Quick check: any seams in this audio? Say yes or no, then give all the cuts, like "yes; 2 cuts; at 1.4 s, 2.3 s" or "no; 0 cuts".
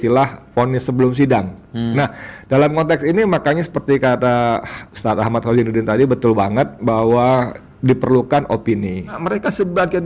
yes; 2 cuts; at 1.9 s, 9.2 s